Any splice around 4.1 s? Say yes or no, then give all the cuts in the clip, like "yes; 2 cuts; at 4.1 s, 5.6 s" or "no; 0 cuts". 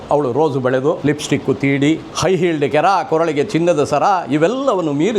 no; 2 cuts; at 1.0 s, 2.1 s